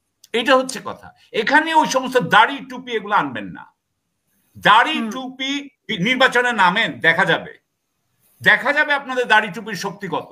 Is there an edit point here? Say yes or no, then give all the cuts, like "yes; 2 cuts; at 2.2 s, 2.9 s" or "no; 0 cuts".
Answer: no; 0 cuts